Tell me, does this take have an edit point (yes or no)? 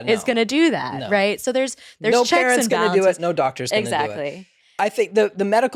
no